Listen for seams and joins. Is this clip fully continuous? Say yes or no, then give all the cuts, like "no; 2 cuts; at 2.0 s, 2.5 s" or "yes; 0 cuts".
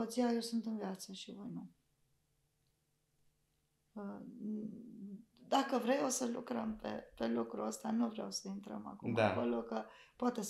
yes; 0 cuts